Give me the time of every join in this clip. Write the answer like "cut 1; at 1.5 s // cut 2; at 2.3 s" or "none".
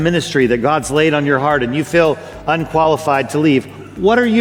none